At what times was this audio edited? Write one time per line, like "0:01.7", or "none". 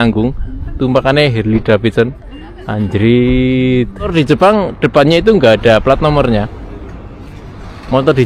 0:04.1